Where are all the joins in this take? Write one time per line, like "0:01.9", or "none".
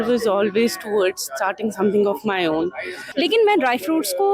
0:03.0